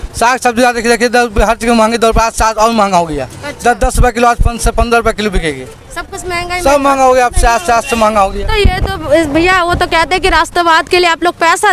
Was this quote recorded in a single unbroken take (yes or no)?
yes